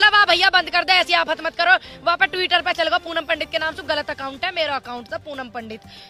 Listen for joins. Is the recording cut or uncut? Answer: uncut